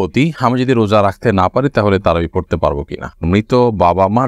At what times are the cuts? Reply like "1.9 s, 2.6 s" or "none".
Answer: 3.2 s